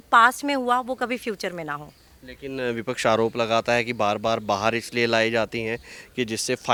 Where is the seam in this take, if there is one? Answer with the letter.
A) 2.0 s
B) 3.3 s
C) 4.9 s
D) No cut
D